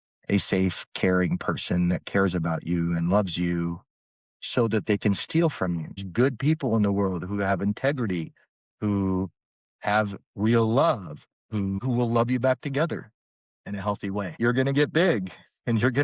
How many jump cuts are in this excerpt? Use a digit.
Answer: 3